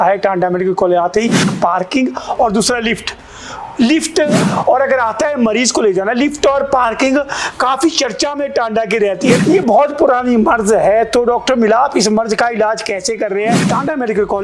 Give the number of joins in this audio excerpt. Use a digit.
4